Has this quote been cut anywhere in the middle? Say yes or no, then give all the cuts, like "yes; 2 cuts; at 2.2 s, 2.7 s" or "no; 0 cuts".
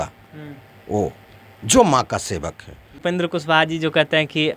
yes; 1 cut; at 3.0 s